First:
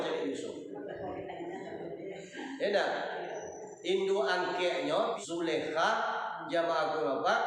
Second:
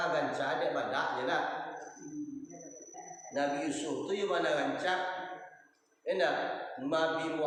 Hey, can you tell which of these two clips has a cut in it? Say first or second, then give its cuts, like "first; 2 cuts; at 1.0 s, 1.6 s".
first; 1 cut; at 5.2 s